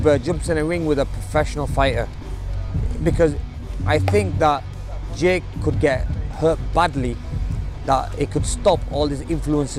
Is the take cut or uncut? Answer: uncut